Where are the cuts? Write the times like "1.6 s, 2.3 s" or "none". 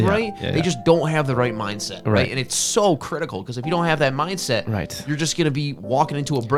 none